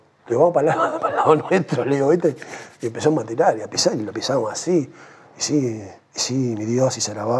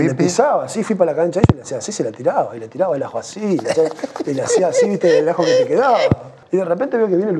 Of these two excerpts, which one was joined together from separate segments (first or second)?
second